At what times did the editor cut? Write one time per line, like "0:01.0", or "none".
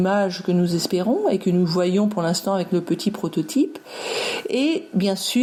none